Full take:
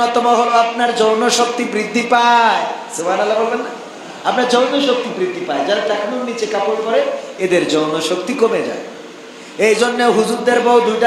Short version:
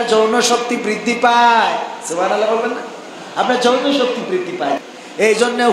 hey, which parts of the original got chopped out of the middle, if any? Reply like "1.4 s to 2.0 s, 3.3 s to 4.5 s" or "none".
5.7 s to 9.2 s